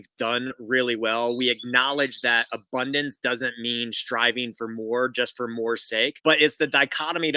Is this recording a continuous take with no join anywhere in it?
no; 1 cut; at 6.2 s

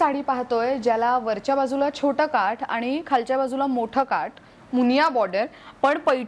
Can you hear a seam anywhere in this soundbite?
no; 0 cuts

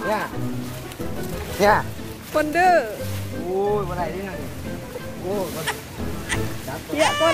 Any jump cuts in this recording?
no; 0 cuts

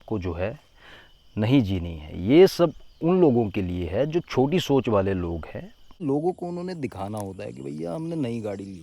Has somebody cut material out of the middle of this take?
yes; 1 cut; at 5.9 s

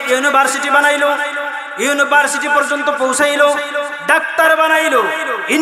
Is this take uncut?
yes; 0 cuts

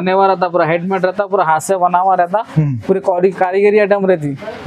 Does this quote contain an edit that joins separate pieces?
no; 0 cuts

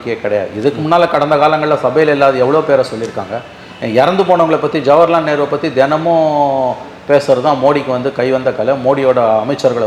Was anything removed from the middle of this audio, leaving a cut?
no; 0 cuts

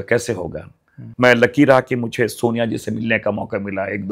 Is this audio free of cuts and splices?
no; 1 cut; at 1.0 s

